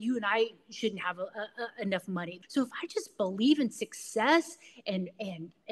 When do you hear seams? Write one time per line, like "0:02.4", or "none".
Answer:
0:02.3